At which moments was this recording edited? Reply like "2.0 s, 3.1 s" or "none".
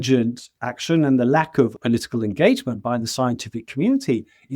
1.8 s